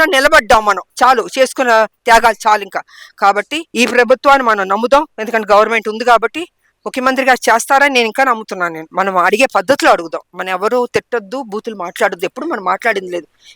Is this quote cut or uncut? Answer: cut